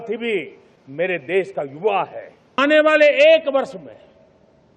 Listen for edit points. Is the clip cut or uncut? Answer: cut